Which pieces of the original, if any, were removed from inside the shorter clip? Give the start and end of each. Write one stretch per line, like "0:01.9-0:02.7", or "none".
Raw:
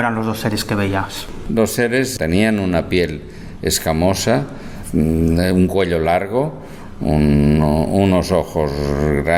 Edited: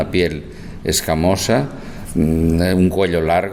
none